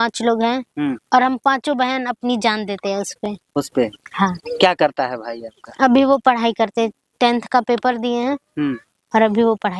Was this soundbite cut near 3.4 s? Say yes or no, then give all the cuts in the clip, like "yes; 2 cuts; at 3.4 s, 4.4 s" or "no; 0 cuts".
no; 0 cuts